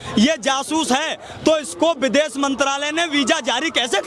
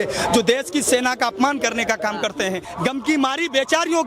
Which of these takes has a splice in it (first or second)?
second